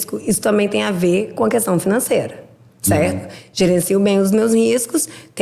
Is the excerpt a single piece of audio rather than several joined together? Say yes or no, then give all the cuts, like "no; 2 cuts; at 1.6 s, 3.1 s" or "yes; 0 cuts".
yes; 0 cuts